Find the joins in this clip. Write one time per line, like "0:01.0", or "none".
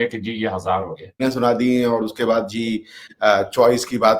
0:01.2